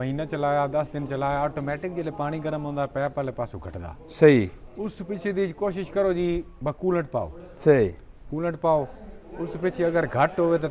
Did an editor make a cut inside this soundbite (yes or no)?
no